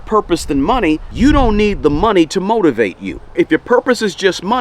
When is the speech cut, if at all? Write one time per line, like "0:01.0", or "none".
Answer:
0:01.1
0:03.3